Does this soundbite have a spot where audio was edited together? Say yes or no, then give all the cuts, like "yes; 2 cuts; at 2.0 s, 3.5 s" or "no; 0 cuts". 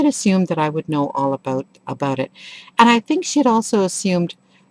yes; 1 cut; at 3.3 s